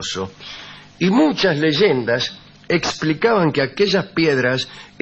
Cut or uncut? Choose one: cut